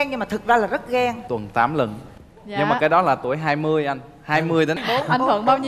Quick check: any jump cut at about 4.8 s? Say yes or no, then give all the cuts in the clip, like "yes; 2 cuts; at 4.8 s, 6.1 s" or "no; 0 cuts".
yes; 2 cuts; at 1.2 s, 4.8 s